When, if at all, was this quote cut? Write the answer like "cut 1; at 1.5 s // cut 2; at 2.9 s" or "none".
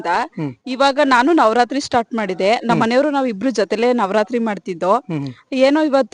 none